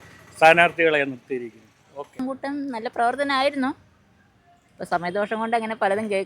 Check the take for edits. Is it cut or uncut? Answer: cut